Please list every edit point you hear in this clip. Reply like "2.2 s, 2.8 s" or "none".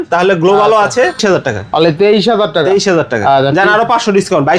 1.2 s